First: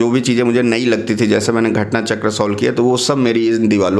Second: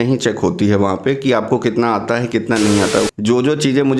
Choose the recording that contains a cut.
second; 1 cut; at 2.9 s

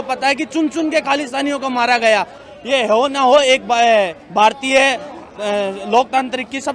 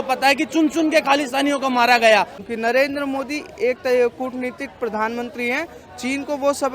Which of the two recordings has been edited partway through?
second; 1 cut; at 2.5 s

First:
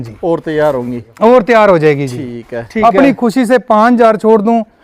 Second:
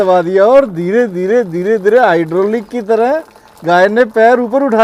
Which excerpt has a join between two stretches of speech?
first; 1 cut; at 2.6 s

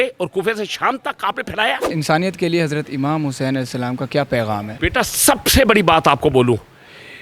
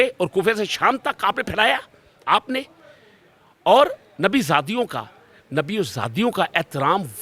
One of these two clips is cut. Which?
first; 2 cuts; at 1.9 s, 4.7 s

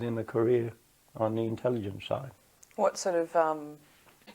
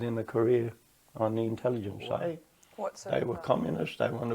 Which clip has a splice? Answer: second; 1 cut; at 2.6 s

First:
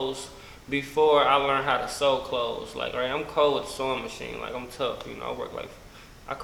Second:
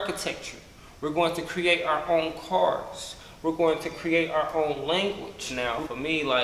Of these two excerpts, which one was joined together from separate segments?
second; 1 cut; at 5.4 s

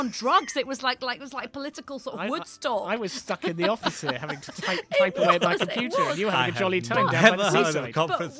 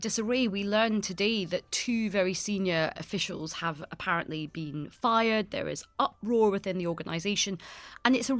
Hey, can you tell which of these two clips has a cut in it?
second; 1 cut; at 3.0 s

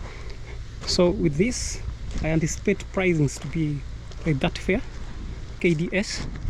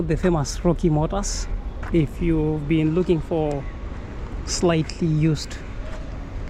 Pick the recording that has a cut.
first; 1 cut; at 5.6 s

